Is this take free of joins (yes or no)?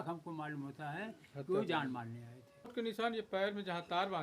no